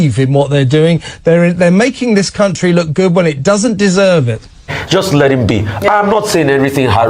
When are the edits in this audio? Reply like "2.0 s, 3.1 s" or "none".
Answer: 4.8 s